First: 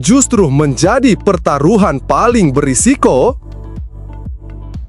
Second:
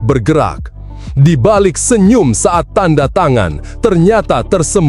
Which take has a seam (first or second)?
first